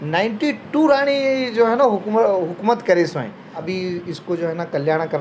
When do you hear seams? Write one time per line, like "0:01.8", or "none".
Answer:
0:03.6